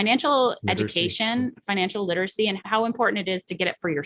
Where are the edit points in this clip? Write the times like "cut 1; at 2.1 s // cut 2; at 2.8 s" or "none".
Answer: cut 1; at 2.6 s